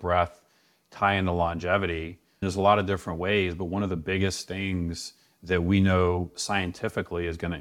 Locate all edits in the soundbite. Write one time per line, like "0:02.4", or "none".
0:02.4